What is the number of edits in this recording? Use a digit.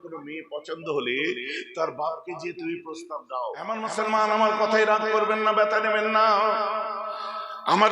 1